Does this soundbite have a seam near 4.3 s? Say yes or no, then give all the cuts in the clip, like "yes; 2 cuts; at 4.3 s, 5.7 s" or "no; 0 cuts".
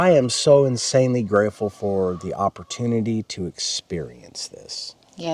no; 0 cuts